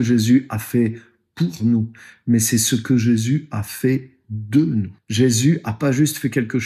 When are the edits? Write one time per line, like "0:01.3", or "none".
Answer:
0:05.0